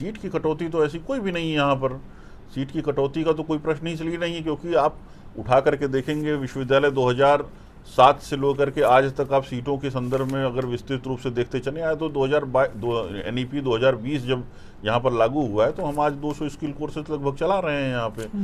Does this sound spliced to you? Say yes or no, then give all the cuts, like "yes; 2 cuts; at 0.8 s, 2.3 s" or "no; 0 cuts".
no; 0 cuts